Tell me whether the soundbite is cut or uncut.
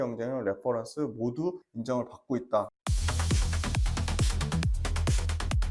cut